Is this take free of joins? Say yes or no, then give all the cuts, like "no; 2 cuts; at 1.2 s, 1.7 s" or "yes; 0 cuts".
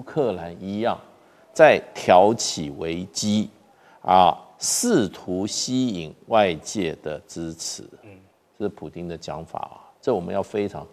yes; 0 cuts